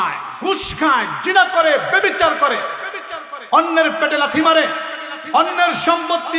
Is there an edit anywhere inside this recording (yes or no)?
no